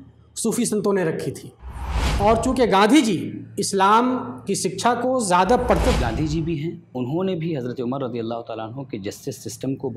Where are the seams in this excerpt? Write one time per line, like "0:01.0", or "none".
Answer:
0:02.0
0:05.9